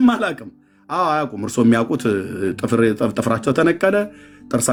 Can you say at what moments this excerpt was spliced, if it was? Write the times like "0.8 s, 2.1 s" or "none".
none